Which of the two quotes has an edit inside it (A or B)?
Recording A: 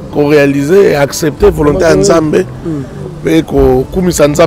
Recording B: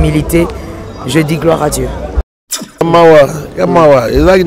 B